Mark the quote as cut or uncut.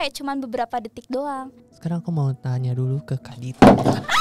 cut